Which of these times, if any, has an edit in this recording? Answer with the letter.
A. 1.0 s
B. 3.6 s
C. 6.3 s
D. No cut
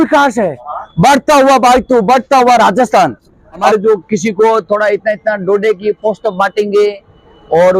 B